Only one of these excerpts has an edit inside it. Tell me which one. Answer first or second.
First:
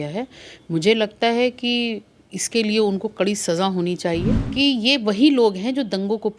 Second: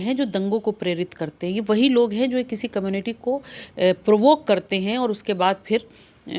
first